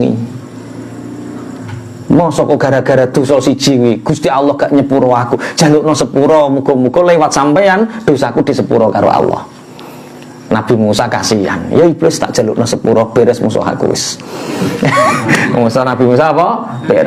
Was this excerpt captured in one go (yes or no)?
yes